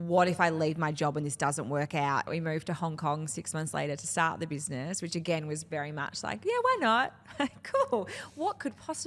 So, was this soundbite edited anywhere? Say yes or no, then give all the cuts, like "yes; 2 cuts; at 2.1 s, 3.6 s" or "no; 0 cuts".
yes; 1 cut; at 2.3 s